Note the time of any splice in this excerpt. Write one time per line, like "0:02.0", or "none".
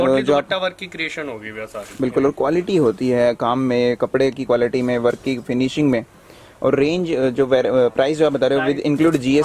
none